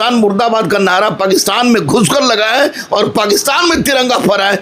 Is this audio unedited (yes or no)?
yes